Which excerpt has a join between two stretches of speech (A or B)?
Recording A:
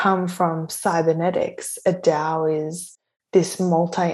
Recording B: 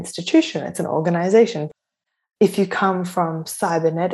B